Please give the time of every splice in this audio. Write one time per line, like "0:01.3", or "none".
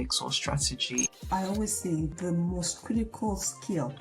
0:02.1